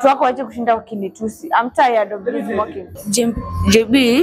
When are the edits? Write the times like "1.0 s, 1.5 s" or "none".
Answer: 3.0 s